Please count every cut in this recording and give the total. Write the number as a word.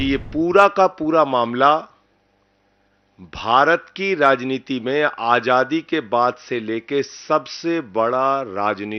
zero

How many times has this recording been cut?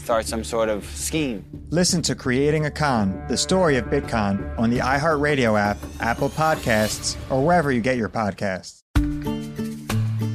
one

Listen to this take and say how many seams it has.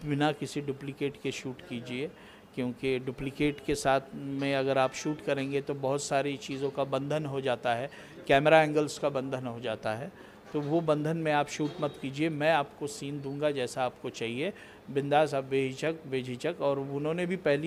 zero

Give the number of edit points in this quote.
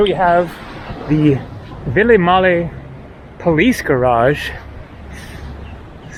zero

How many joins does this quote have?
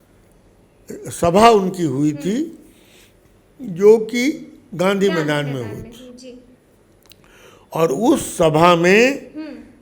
zero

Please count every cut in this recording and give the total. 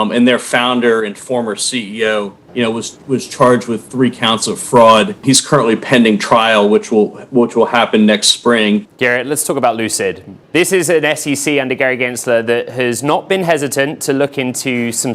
three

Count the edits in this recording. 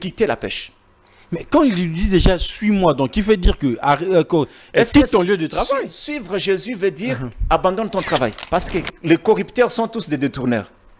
one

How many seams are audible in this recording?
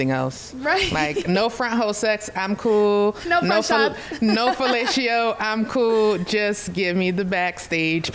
zero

